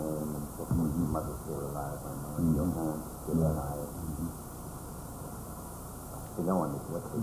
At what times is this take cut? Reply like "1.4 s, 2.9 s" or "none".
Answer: 1.5 s